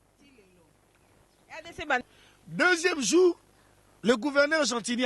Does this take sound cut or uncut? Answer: cut